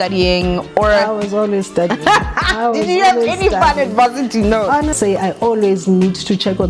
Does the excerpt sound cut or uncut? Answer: cut